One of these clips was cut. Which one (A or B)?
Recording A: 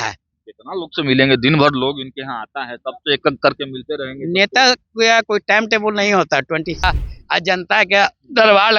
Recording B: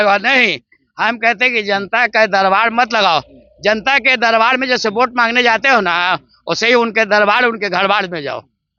A